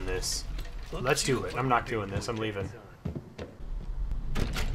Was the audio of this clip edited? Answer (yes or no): yes